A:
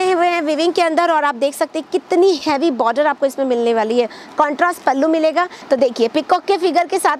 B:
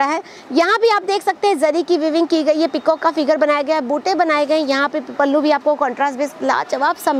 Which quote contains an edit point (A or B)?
A